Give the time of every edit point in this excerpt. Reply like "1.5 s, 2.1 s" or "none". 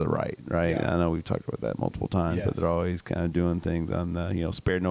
none